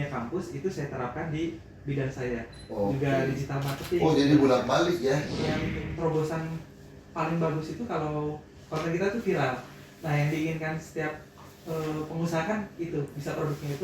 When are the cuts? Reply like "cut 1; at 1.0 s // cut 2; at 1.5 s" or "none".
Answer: cut 1; at 5.7 s